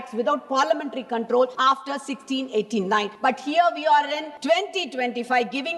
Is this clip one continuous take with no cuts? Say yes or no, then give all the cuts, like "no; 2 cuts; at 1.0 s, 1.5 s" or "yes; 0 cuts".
no; 3 cuts; at 1.5 s, 3.1 s, 4.3 s